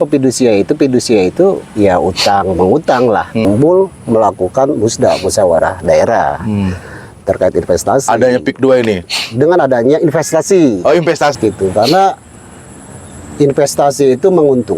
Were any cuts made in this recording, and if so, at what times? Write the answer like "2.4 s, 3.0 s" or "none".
3.4 s, 11.3 s